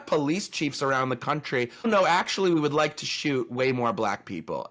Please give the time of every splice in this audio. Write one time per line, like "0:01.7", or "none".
0:01.9